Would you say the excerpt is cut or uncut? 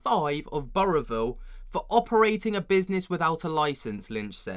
uncut